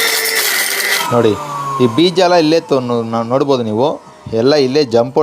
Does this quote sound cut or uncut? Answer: cut